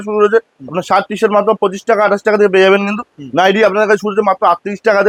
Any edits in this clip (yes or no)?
no